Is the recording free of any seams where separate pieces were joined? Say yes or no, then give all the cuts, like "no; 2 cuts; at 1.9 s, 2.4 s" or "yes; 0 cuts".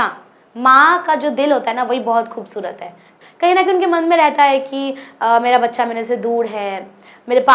no; 1 cut; at 3.1 s